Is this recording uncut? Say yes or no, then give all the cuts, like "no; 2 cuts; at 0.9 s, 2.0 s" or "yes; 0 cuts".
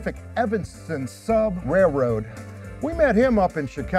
no; 1 cut; at 1.6 s